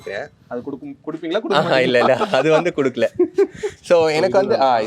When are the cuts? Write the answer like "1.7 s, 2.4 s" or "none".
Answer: none